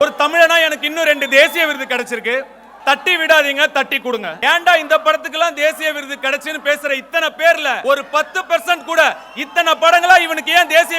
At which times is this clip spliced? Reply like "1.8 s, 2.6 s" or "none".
4.3 s, 7.8 s

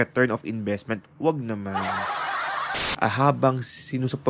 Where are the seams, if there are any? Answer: 2.6 s

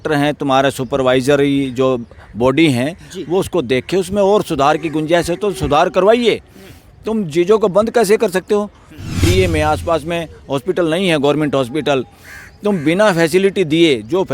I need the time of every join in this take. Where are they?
9.2 s

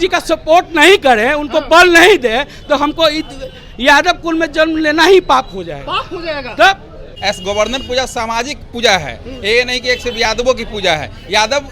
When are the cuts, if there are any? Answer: none

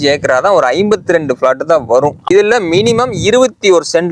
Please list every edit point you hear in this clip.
2.3 s

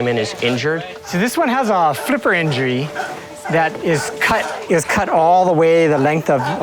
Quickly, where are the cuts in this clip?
0.9 s

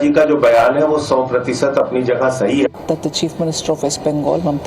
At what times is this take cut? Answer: 2.8 s

